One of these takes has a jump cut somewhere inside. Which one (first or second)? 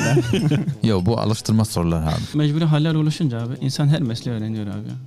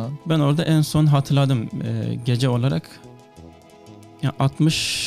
first